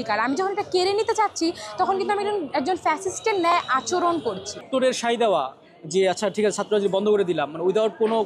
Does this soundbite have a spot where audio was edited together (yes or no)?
yes